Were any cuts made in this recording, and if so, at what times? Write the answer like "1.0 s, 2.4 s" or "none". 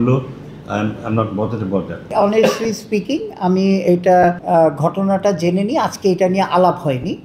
2.1 s, 4.4 s